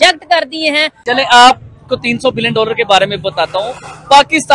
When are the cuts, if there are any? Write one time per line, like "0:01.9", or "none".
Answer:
0:01.1